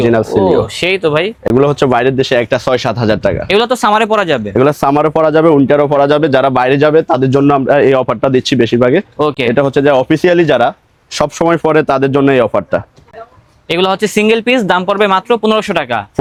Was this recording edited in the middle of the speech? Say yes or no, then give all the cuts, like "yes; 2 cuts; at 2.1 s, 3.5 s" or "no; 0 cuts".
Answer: no; 0 cuts